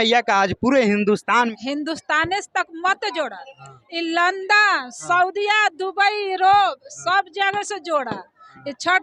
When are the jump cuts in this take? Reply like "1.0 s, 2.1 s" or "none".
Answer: 1.5 s